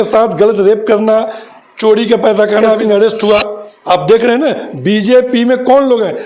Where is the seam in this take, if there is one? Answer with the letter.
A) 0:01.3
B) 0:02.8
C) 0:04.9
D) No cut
B